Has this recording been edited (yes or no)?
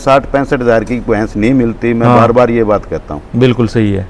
no